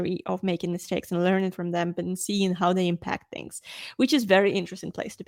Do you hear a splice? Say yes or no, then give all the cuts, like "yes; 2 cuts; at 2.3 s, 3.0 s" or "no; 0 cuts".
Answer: no; 0 cuts